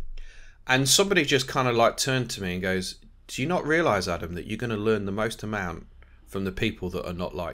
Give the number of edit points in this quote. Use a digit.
0